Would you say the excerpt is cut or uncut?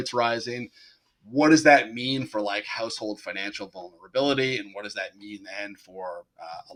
uncut